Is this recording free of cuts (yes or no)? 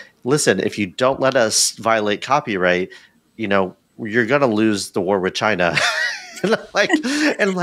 yes